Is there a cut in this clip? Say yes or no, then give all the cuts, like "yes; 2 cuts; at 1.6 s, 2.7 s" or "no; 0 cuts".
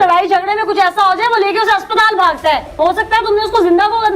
yes; 1 cut; at 2.7 s